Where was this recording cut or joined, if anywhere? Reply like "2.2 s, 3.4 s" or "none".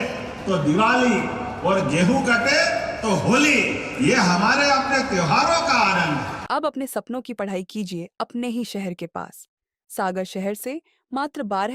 6.4 s